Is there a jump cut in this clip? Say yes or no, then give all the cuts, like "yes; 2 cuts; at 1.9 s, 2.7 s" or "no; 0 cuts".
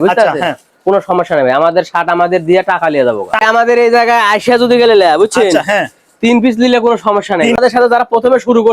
yes; 2 cuts; at 3.4 s, 7.6 s